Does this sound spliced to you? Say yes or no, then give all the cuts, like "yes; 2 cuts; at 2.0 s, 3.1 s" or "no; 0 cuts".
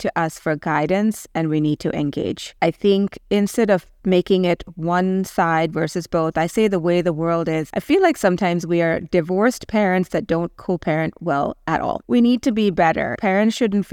yes; 4 cuts; at 2.4 s, 7.6 s, 12.0 s, 13.2 s